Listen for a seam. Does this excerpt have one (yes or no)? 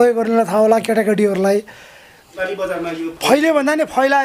yes